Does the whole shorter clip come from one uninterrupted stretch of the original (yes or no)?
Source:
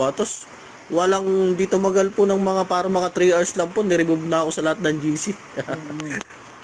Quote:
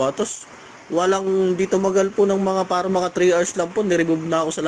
yes